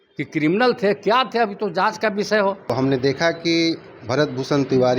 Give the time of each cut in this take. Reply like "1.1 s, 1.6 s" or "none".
2.6 s